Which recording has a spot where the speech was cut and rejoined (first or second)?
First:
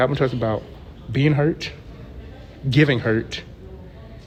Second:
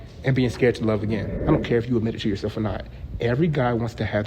second